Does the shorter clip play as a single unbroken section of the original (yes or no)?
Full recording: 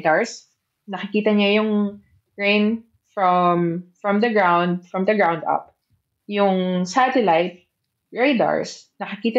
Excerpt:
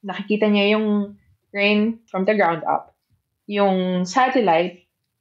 no